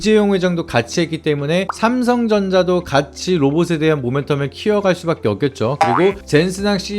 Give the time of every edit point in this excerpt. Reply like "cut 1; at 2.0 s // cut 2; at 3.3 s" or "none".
cut 1; at 5.7 s